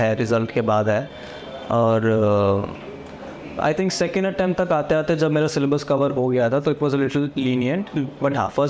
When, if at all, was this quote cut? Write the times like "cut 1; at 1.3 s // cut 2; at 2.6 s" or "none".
none

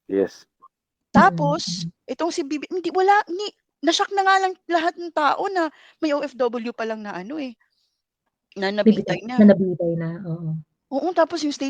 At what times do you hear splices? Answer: none

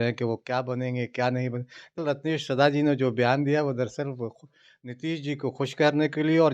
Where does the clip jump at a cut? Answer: cut 1; at 2.0 s

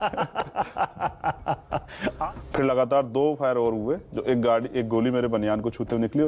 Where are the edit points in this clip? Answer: cut 1; at 2.2 s

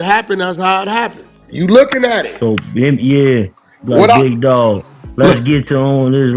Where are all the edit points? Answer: cut 1; at 1.4 s

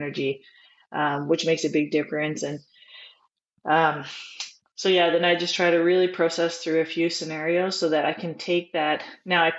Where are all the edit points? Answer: none

